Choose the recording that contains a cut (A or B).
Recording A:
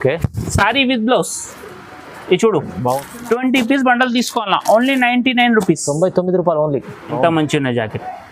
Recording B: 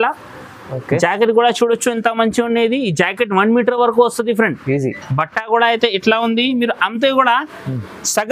A